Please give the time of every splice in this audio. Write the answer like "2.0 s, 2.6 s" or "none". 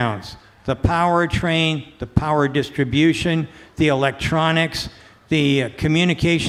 none